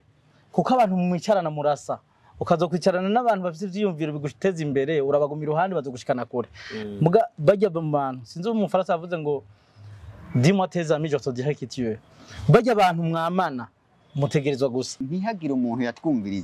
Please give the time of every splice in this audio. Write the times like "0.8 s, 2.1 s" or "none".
15.0 s